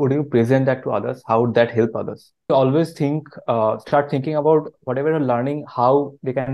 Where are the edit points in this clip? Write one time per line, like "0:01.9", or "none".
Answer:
0:02.5